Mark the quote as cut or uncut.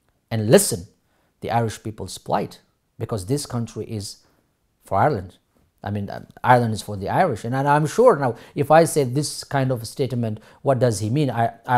uncut